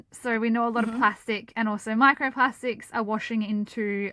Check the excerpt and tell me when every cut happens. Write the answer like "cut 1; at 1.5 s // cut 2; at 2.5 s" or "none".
none